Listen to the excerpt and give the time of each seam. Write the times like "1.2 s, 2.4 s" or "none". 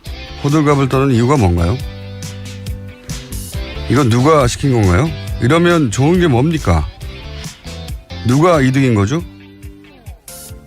2.3 s